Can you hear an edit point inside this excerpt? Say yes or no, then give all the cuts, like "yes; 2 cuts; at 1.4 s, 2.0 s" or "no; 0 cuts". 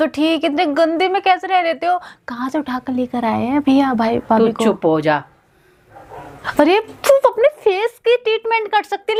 no; 0 cuts